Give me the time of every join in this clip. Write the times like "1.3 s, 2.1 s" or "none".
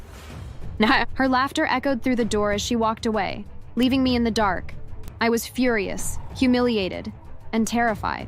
none